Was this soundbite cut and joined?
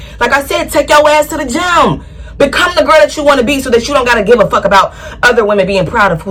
no; 0 cuts

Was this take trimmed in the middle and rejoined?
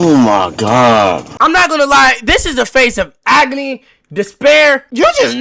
yes; 1 cut; at 1.3 s

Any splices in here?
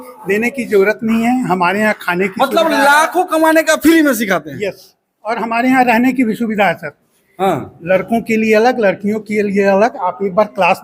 no; 0 cuts

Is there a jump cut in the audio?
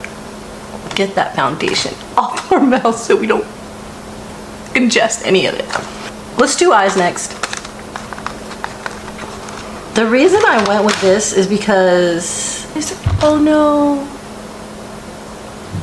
no; 0 cuts

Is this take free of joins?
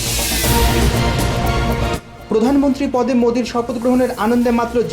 no; 1 cut; at 2.1 s

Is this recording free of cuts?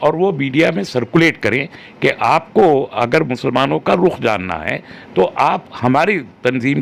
yes; 0 cuts

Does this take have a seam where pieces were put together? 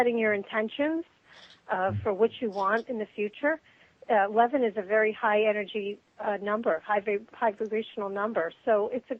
no; 0 cuts

